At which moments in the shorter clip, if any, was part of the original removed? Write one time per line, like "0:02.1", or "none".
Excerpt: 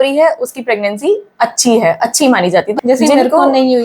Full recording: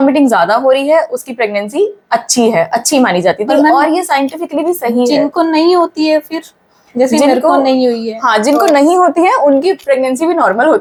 0:02.7